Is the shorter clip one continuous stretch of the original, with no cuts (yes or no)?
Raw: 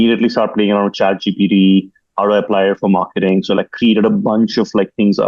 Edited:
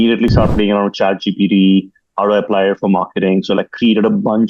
yes